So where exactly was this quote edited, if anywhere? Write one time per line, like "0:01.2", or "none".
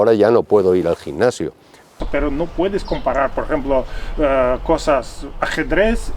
0:02.0